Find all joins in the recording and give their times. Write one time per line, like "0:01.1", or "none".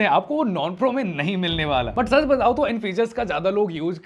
none